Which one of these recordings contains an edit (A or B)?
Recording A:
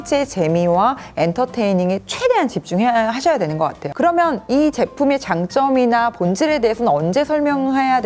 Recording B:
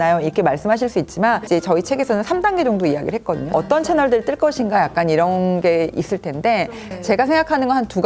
B